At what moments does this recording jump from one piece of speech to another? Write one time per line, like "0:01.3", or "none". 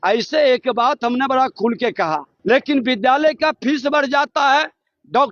0:02.3